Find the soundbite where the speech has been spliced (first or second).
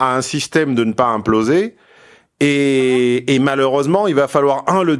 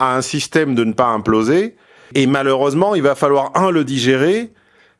second